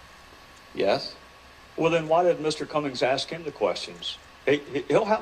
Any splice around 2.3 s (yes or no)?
yes